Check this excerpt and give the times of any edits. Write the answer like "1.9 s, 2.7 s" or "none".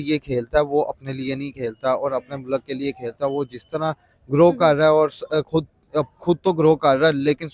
none